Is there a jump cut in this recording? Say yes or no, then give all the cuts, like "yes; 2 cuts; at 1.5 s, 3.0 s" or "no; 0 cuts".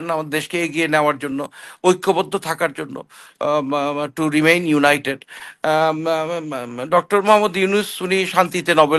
no; 0 cuts